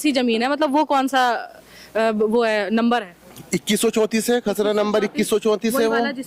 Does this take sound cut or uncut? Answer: uncut